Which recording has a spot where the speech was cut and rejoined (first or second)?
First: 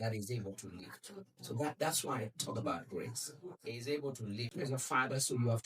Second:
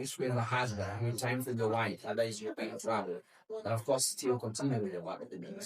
first